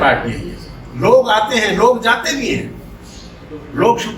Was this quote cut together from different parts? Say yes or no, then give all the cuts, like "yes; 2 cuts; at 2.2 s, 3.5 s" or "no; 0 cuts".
no; 0 cuts